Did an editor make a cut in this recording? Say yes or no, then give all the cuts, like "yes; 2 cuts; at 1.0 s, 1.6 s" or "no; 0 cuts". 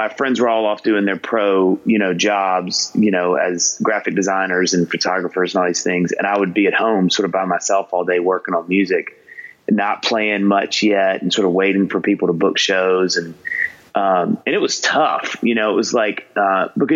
no; 0 cuts